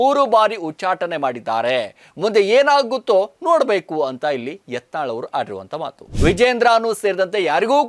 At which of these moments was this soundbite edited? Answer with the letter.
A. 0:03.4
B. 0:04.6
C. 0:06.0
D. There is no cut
C